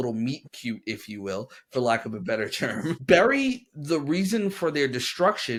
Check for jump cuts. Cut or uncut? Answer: uncut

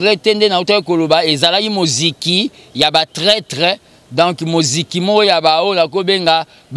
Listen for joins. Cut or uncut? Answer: uncut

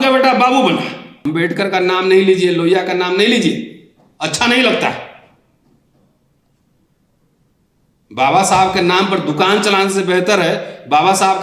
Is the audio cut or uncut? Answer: cut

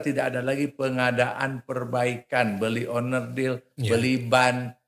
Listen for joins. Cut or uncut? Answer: uncut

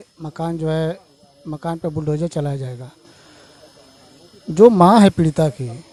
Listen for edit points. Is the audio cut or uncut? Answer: uncut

